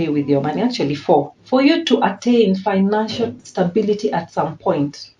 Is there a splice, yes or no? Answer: yes